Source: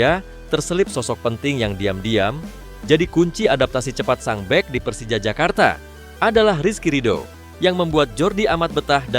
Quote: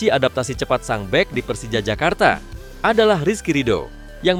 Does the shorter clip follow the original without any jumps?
yes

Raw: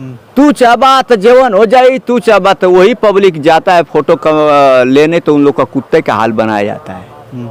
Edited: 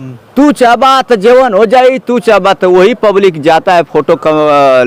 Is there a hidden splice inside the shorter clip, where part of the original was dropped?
no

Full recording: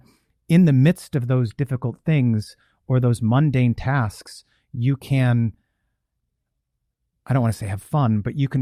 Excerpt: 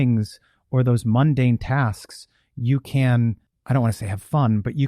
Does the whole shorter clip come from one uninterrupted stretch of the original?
no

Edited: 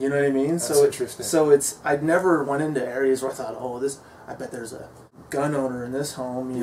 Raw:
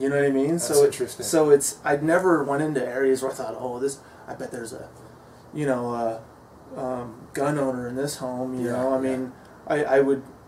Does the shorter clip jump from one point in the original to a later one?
yes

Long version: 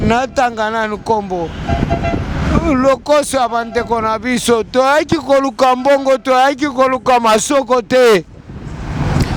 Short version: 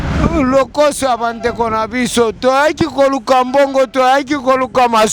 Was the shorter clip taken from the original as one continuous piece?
yes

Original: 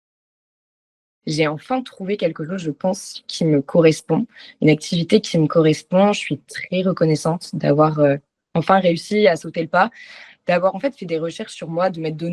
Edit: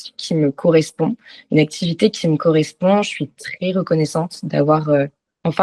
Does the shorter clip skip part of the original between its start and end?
no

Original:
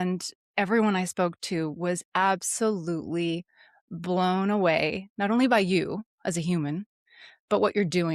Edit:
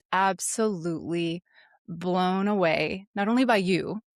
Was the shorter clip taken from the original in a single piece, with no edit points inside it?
yes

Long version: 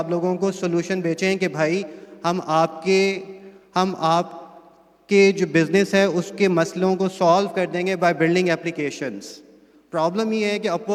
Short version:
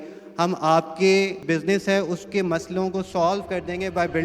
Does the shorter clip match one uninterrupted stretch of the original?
no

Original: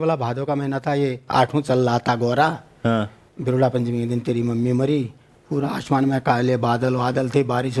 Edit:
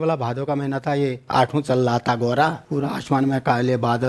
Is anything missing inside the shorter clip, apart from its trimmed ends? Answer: yes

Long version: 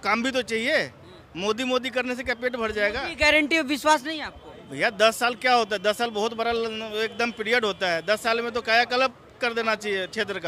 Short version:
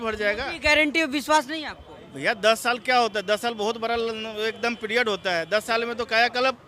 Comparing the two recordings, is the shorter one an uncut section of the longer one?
yes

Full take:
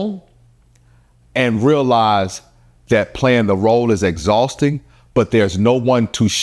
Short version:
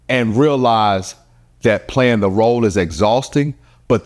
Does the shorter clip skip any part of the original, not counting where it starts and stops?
no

